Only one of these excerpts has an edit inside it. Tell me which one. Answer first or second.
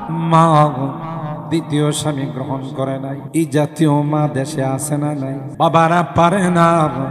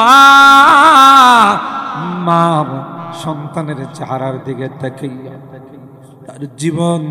first